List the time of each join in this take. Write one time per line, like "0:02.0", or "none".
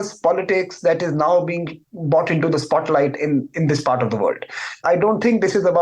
0:04.8